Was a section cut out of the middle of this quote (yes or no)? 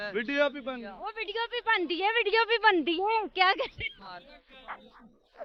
no